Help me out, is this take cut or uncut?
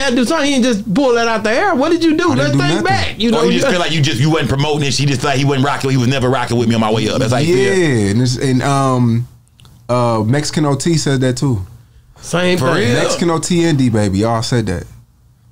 uncut